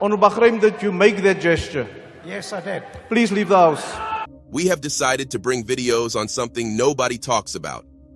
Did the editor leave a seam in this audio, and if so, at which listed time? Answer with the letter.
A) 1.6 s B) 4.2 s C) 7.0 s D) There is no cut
B